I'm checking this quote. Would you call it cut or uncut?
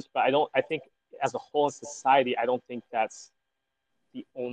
uncut